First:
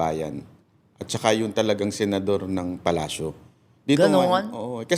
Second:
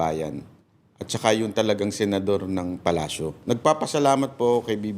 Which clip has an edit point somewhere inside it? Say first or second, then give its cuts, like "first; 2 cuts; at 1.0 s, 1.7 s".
second; 1 cut; at 3.4 s